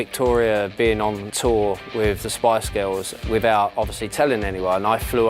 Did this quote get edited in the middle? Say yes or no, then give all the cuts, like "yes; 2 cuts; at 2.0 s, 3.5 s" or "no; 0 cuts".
yes; 2 cuts; at 1.3 s, 3.1 s